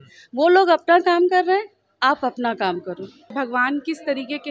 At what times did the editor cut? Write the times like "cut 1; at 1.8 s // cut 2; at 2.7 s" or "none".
cut 1; at 3.3 s